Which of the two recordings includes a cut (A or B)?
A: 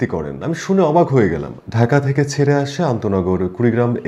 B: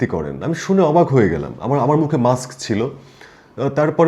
A